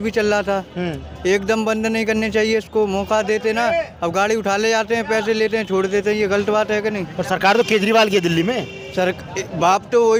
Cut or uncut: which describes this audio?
uncut